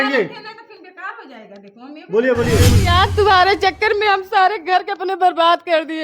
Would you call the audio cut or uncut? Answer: cut